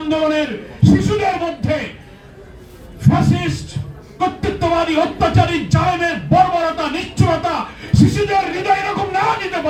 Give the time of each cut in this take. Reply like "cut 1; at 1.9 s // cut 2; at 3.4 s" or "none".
none